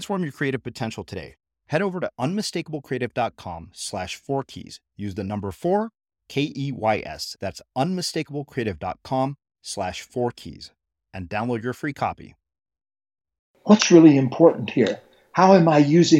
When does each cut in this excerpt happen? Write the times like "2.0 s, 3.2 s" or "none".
13.5 s